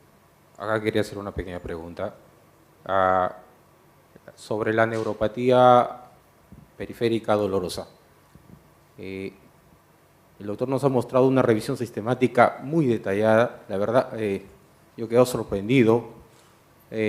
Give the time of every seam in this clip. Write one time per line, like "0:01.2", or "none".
0:07.2